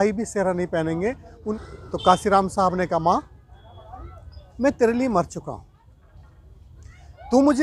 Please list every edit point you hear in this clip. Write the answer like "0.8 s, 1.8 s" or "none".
1.5 s